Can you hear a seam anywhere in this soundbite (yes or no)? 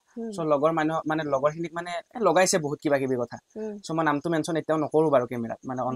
no